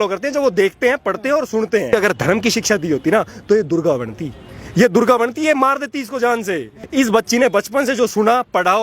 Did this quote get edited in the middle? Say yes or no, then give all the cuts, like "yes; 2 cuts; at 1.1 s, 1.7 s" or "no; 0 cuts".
yes; 2 cuts; at 1.9 s, 6.7 s